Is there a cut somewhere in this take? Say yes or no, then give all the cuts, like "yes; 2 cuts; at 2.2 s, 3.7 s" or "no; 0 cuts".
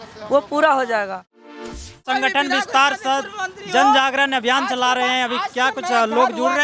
yes; 1 cut; at 1.6 s